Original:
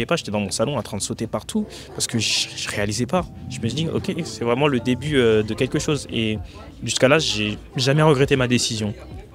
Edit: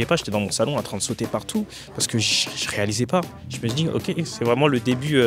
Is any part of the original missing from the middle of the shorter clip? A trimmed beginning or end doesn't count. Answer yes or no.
no